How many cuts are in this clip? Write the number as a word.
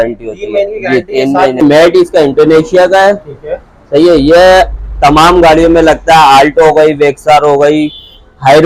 one